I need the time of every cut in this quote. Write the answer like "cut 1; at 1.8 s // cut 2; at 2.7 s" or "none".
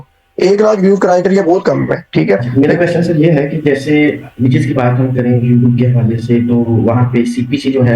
cut 1; at 2.5 s